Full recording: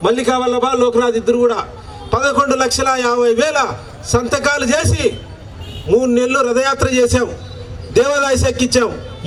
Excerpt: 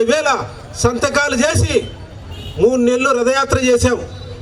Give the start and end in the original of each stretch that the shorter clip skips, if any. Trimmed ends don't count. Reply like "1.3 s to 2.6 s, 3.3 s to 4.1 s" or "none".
none